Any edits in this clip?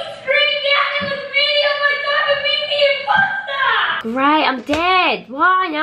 yes; 1 cut; at 3.9 s

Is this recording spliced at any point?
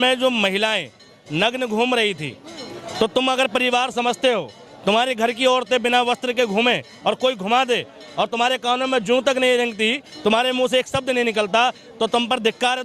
no; 0 cuts

